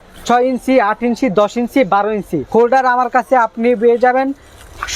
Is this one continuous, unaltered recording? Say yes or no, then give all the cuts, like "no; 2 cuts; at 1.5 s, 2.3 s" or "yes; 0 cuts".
no; 1 cut; at 2.4 s